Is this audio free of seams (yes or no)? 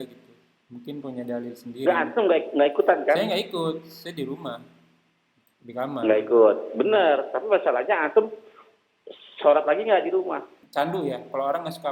no